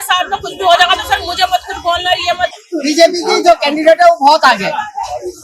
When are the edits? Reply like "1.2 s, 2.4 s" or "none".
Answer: 2.7 s